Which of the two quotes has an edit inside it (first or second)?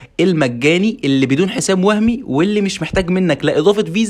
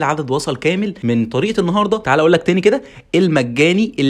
second